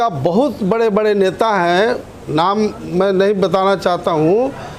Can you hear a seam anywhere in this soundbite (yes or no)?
no